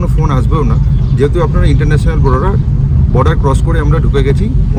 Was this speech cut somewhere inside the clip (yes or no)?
no